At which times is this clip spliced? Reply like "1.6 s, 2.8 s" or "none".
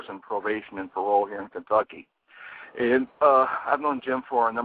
1.8 s